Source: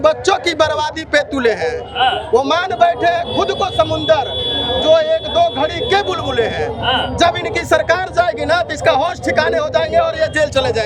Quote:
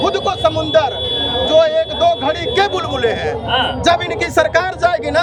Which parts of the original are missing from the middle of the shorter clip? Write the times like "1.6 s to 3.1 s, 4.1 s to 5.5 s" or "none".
none